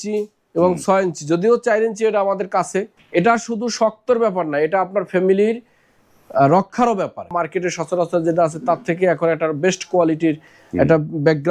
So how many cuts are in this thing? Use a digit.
2